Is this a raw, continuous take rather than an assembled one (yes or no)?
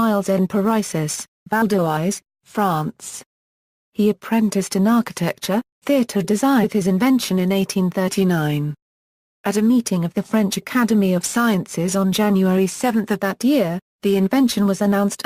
yes